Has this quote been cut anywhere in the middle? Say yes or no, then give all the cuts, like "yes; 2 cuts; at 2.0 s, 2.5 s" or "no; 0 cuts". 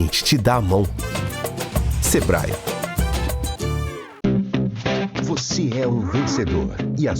yes; 1 cut; at 4.1 s